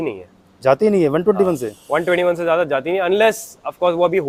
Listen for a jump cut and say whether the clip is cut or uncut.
uncut